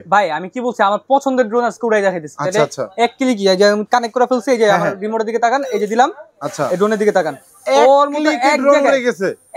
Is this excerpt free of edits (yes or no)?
yes